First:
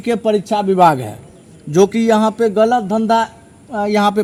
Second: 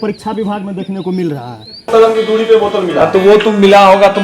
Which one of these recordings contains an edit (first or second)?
second